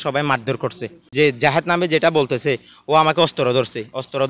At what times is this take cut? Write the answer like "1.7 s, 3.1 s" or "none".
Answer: 1.0 s